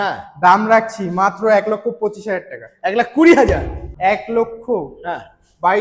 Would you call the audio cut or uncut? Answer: cut